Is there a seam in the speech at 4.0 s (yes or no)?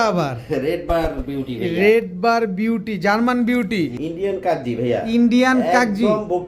yes